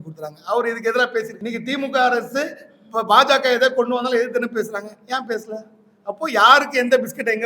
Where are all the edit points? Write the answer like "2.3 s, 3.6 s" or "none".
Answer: 1.4 s